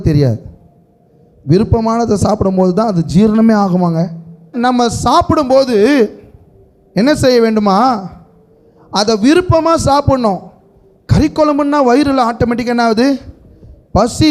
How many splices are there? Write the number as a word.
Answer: one